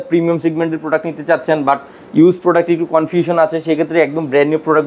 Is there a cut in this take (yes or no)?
no